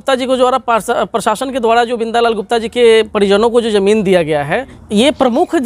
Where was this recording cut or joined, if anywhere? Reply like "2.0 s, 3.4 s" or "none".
4.7 s